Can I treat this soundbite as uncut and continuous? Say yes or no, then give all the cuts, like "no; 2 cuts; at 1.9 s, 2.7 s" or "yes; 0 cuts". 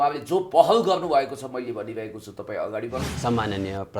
no; 1 cut; at 3.1 s